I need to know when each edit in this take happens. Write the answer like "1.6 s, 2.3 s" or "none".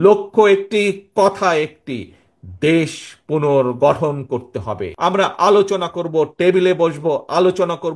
4.9 s